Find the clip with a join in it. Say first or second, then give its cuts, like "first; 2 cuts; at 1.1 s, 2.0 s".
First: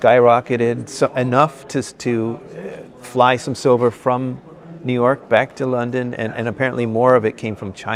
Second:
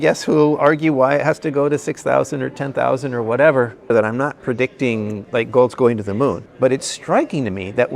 second; 2 cuts; at 3.8 s, 6.5 s